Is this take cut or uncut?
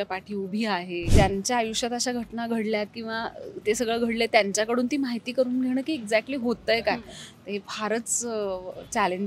cut